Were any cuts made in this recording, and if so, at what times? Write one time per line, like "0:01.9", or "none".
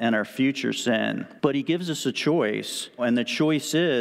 0:01.3
0:03.0